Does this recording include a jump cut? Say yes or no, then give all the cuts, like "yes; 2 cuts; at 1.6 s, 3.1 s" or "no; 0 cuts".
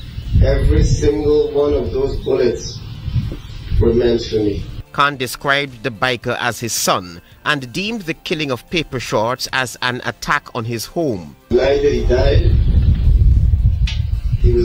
no; 0 cuts